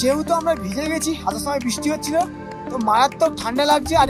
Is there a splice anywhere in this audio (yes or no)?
no